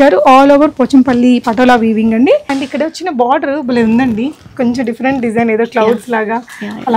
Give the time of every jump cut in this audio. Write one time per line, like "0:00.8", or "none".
0:02.5